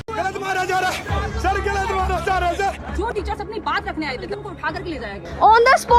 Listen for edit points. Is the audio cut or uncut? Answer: uncut